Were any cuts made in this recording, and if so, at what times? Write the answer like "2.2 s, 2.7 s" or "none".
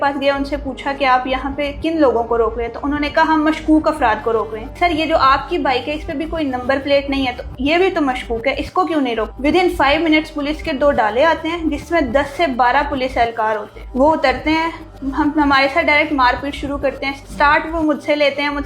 4.7 s, 9.3 s, 13.8 s, 17.1 s